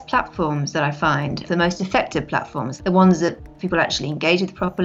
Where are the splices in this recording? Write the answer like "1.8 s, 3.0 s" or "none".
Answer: 1.4 s, 2.6 s